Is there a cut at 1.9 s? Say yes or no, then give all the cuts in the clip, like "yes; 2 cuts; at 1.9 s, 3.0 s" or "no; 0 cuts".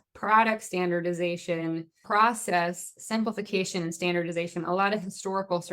yes; 1 cut; at 1.9 s